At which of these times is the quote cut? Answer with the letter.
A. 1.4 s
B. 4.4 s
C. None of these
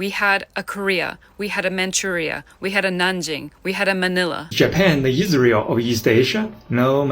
B